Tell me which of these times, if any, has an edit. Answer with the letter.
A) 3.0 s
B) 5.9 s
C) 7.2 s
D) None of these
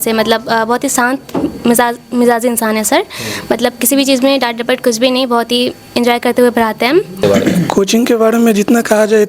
C